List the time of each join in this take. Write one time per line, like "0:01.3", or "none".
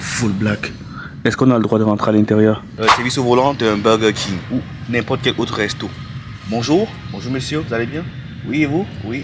0:02.7